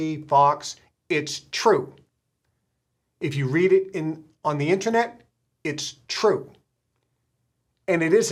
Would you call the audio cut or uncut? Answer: uncut